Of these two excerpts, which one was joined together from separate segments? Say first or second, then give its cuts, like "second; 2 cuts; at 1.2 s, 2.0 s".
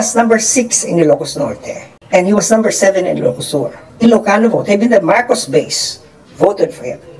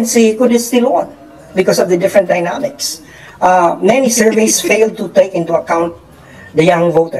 first; 1 cut; at 3.8 s